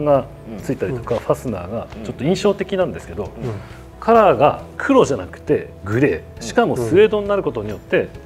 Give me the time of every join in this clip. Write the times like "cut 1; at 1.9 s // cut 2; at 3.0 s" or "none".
none